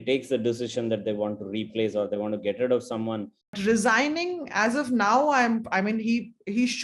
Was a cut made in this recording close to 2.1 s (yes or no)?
no